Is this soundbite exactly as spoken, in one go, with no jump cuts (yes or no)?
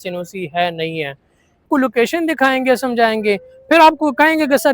no